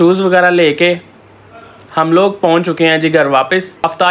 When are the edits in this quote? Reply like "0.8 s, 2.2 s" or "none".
none